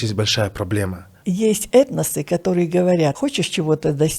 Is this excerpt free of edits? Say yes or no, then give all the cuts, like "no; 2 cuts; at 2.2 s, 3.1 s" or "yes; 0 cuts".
no; 2 cuts; at 1.2 s, 3.2 s